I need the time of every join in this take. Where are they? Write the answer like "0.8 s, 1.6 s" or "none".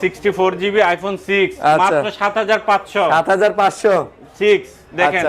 none